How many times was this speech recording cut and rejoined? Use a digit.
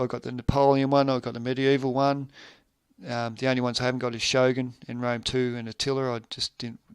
1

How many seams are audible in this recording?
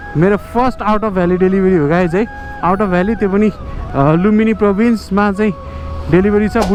0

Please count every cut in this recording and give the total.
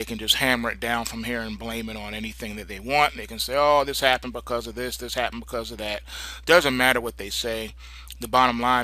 0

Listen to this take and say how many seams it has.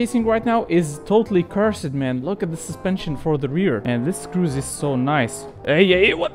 1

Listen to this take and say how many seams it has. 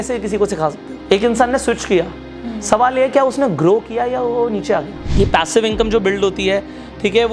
3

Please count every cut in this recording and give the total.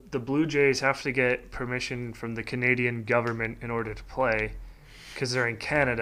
0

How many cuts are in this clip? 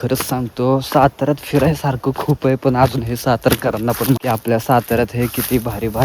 1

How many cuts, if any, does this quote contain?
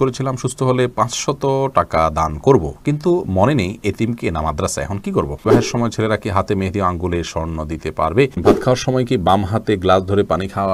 2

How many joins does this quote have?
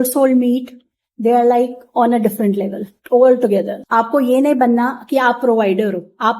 1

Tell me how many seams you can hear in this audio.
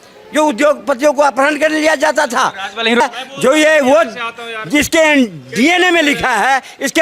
1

